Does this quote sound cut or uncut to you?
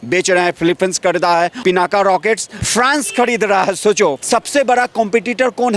cut